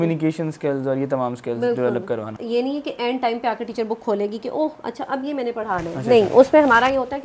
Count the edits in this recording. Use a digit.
1